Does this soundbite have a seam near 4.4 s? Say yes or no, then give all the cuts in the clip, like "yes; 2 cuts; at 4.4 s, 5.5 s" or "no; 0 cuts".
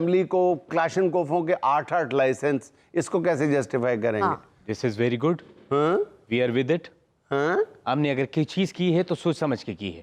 no; 0 cuts